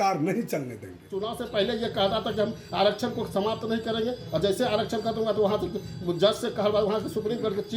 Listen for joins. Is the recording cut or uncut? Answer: cut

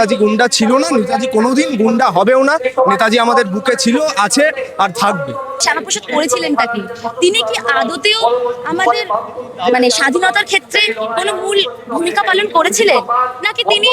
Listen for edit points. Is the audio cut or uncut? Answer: cut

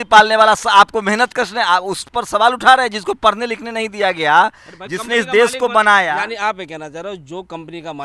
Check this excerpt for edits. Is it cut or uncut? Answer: uncut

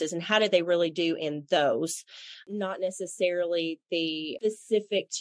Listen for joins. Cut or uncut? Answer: cut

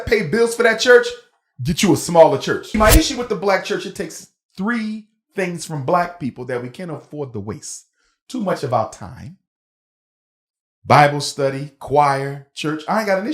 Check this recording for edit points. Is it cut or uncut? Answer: cut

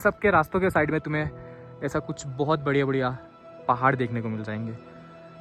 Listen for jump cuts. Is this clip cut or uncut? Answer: uncut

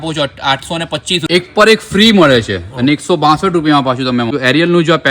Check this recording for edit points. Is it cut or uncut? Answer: cut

